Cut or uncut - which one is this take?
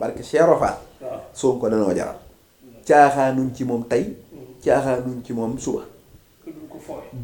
uncut